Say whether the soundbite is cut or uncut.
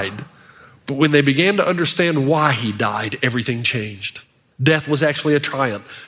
uncut